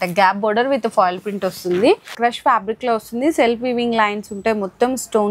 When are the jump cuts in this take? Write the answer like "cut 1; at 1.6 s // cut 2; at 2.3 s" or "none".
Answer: cut 1; at 2.2 s